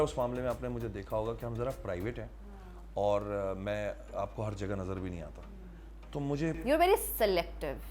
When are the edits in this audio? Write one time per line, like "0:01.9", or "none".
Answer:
none